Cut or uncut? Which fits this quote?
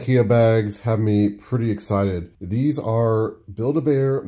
uncut